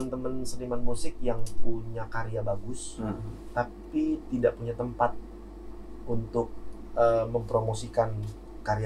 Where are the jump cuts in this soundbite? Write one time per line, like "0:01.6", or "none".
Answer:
none